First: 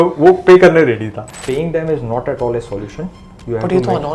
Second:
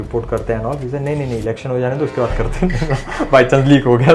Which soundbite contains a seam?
first; 1 cut; at 1.3 s

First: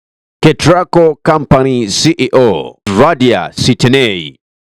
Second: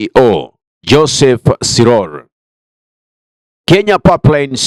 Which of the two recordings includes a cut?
first; 1 cut; at 2.8 s

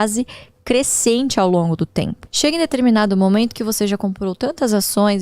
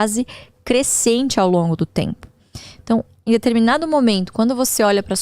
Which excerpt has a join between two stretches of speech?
first; 1 cut; at 2.2 s

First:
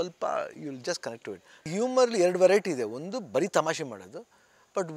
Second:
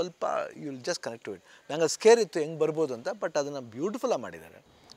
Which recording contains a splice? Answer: first; 1 cut; at 1.7 s

